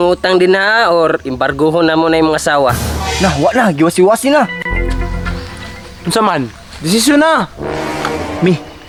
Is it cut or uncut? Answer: uncut